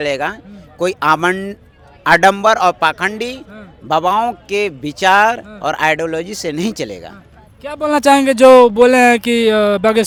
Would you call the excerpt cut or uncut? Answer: uncut